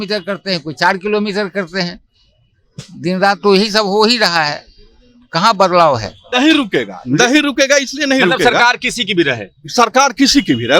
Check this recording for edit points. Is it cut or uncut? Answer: cut